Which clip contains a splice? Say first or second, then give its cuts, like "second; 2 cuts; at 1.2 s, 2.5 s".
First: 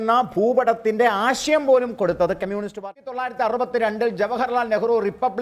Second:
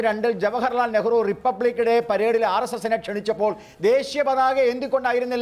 first; 1 cut; at 2.9 s